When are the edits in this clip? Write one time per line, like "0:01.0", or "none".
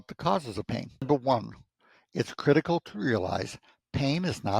0:01.0